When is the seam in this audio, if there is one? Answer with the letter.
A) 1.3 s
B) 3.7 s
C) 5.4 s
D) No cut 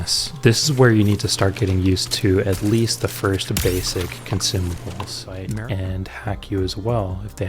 C